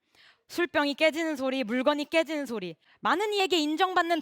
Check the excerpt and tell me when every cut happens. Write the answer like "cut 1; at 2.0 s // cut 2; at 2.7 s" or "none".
cut 1; at 3.3 s